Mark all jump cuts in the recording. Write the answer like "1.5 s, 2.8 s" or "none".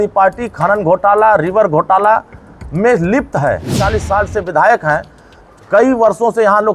3.8 s